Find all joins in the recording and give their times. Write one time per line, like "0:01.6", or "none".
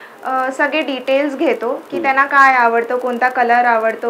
none